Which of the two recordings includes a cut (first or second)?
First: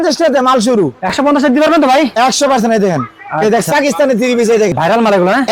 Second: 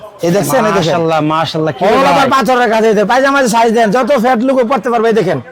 first